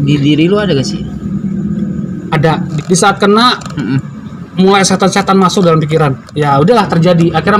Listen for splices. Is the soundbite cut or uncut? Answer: cut